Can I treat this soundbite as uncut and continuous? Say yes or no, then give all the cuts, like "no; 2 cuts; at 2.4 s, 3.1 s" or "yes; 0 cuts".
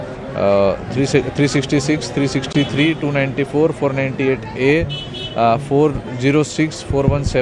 no; 1 cut; at 3.6 s